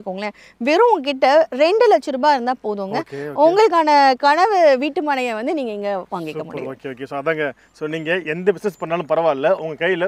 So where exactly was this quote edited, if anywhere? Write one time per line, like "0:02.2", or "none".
none